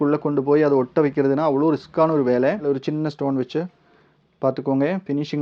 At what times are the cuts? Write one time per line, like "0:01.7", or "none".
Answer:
0:02.8